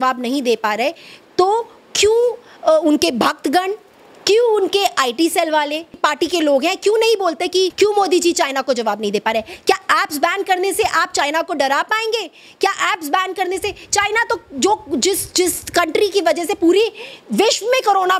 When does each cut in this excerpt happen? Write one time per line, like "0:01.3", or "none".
0:06.0
0:07.7